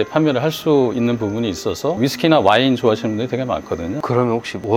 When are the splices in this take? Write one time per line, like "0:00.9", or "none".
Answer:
0:02.0
0:03.9

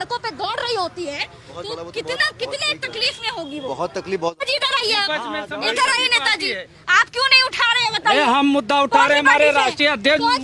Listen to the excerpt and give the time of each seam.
0:04.4

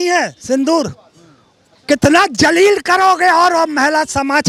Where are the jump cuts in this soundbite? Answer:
none

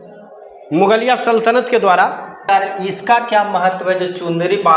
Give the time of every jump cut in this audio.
0:02.4

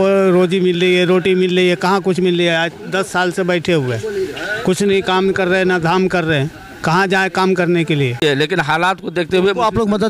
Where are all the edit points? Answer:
0:08.2

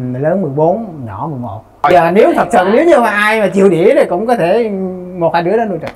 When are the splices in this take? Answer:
0:01.8

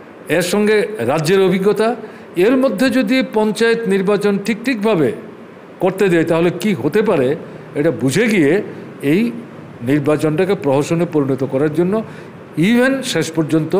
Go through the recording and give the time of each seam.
none

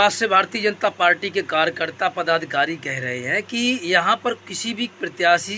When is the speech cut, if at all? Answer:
none

